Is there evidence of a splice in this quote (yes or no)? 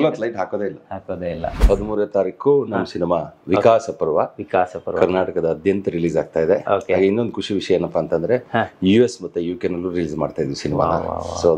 yes